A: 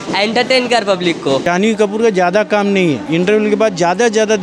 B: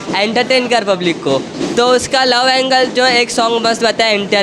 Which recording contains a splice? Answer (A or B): A